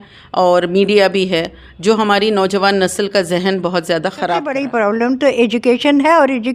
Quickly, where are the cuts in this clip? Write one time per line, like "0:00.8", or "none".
0:04.5

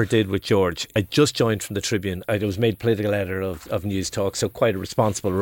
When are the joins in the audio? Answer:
0:00.9
0:02.3

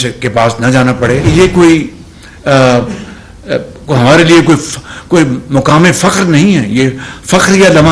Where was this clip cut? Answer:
0:01.3

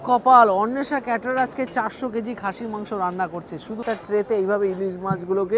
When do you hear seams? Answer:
0:03.8

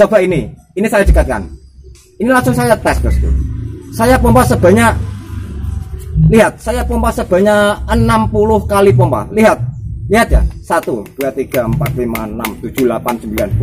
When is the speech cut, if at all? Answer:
none

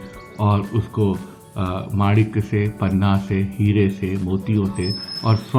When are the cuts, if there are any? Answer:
none

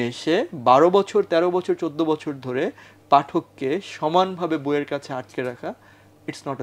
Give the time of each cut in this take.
none

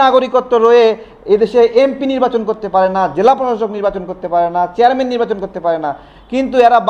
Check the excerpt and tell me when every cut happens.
none

